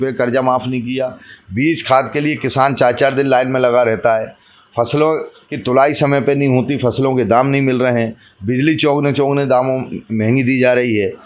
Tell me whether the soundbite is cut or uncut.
uncut